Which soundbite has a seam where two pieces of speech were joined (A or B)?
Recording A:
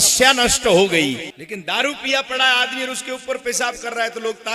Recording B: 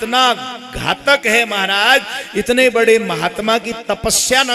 A